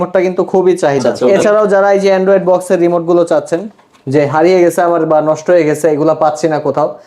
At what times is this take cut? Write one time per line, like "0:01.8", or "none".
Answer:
0:01.1